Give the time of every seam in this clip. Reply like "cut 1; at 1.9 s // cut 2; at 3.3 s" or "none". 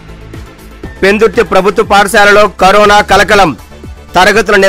cut 1; at 1.0 s